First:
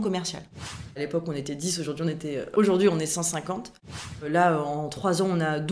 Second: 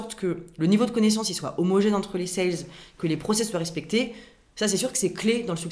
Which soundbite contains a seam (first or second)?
first